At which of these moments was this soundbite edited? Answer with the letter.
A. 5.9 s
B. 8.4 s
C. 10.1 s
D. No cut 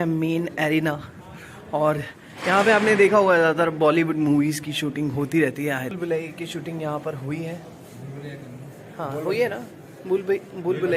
A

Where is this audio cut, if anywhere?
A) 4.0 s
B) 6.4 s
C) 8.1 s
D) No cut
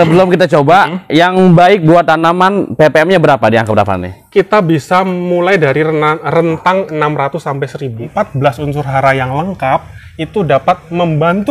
C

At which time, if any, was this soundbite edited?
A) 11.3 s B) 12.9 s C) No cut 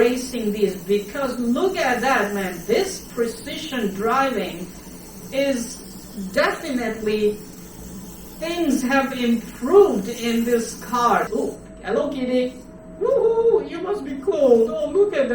A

